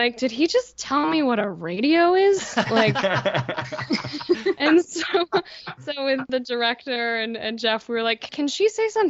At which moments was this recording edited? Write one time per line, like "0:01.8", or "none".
none